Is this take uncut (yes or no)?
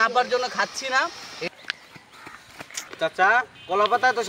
no